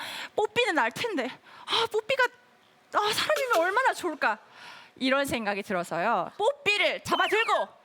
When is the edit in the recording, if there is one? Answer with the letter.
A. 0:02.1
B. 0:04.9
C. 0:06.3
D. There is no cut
C